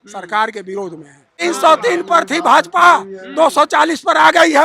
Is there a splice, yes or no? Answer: yes